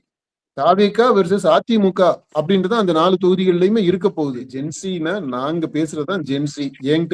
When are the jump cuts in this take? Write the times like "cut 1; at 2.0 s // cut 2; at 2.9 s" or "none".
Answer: cut 1; at 4.4 s